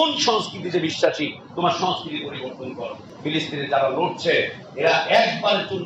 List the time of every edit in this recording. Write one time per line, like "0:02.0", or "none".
0:03.0